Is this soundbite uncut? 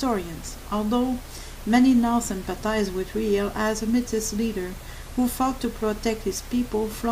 yes; 0 cuts

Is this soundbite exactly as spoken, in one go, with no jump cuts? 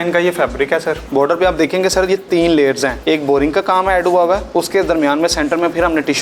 no; 3 cuts; at 1.0 s, 2.9 s, 4.5 s

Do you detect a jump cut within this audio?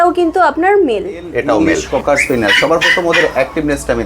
yes; 1 cut; at 1.6 s

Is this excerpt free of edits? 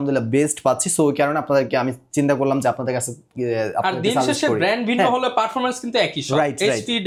yes; 0 cuts

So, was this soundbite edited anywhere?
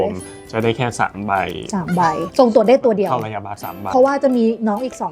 yes; 2 cuts; at 2.2 s, 3.7 s

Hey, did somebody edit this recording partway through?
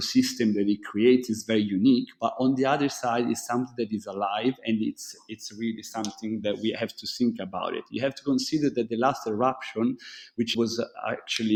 no; 0 cuts

